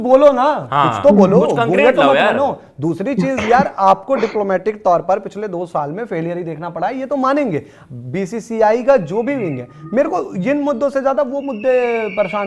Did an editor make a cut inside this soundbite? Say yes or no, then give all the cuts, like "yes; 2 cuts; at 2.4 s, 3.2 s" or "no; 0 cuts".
no; 0 cuts